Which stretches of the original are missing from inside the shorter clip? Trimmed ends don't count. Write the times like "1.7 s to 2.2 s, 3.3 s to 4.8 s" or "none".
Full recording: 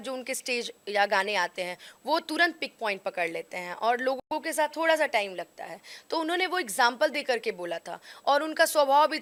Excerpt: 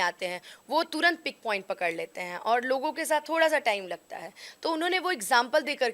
4.2 s to 4.3 s

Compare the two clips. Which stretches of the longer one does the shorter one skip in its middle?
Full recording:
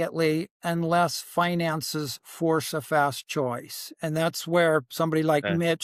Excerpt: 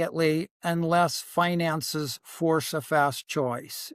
none

